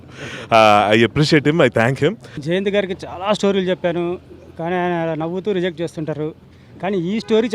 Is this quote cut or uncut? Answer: cut